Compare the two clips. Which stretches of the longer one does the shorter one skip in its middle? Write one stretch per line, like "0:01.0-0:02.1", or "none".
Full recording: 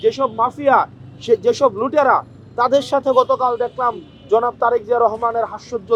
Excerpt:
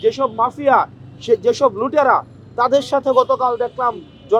none